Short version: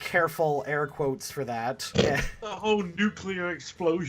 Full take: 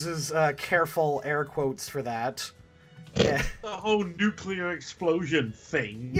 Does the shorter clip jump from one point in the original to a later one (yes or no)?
yes